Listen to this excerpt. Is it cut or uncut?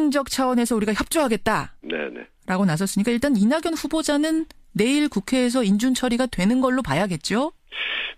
cut